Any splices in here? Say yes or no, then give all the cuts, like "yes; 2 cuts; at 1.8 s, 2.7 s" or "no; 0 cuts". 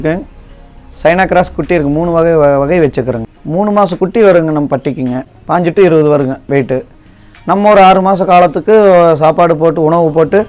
yes; 2 cuts; at 3.2 s, 5.3 s